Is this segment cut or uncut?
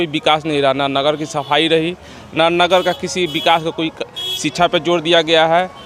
uncut